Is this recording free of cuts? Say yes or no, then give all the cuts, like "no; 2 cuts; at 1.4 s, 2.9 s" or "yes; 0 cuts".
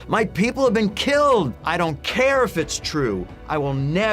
no; 1 cut; at 1.6 s